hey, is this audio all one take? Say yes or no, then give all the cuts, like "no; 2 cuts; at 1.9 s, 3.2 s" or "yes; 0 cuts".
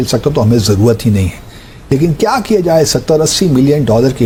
yes; 0 cuts